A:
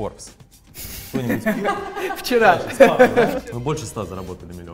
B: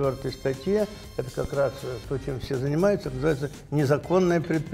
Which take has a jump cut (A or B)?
A